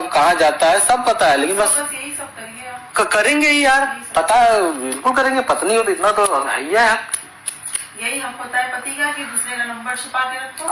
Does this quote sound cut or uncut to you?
uncut